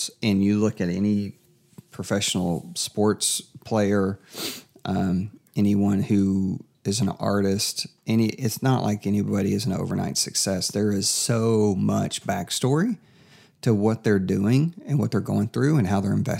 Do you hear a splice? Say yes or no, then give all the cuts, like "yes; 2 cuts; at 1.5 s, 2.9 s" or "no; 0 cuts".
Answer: no; 0 cuts